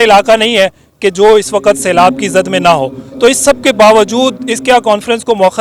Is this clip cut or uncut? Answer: uncut